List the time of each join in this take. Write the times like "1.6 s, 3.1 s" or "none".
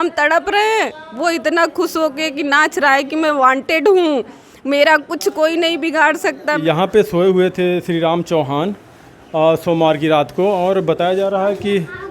6.6 s